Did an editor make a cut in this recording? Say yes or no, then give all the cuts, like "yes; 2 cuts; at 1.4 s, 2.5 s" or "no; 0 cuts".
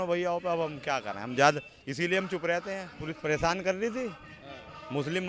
yes; 1 cut; at 3.2 s